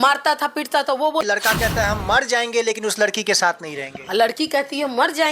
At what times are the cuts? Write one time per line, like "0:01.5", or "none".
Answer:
0:01.2